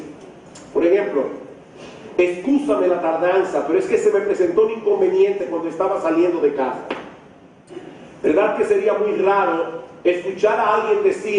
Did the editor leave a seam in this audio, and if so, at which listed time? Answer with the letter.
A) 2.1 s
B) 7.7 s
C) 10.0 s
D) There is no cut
B